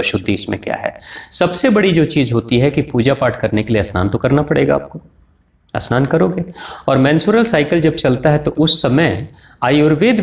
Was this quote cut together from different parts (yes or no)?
no